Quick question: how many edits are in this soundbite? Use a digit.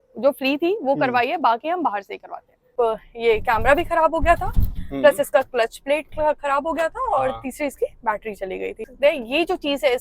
2